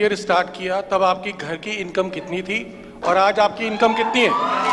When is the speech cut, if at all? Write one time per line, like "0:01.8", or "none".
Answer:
none